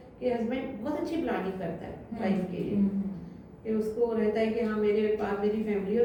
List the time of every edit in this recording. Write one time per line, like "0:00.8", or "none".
none